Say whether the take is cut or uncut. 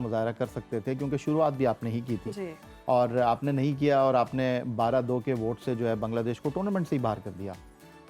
uncut